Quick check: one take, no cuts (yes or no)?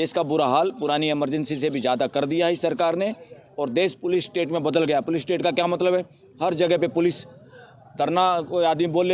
yes